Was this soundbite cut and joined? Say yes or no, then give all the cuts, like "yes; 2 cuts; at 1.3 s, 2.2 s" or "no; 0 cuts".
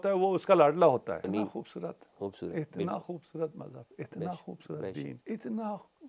yes; 2 cuts; at 1.2 s, 5.2 s